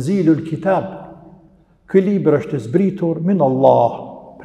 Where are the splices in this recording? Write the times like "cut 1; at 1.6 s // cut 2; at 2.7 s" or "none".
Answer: none